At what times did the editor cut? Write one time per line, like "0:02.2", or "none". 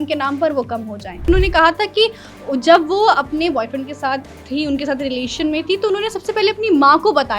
0:01.3